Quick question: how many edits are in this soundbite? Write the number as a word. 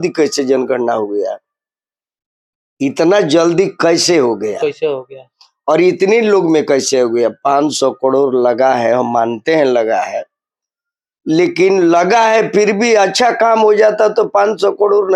zero